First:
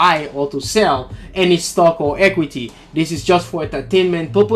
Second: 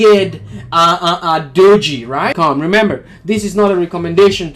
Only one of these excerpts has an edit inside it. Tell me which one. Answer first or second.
second